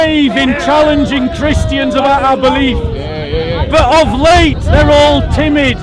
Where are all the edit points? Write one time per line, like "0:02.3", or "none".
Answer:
none